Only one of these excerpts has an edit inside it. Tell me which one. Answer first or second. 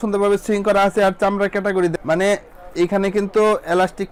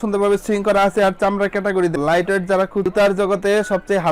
second